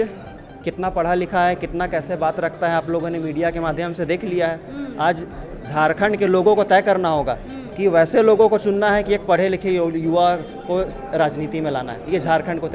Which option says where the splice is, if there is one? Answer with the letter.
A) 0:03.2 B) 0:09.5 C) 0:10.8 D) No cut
D